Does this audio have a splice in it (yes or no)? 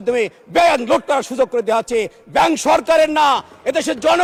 no